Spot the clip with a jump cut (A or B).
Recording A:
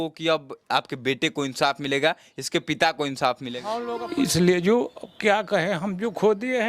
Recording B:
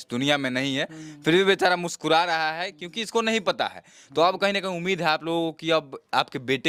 A